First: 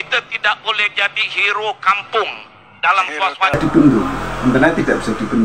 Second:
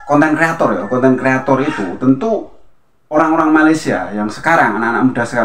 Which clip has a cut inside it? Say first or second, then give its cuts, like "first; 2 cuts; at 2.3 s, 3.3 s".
first; 1 cut; at 3.6 s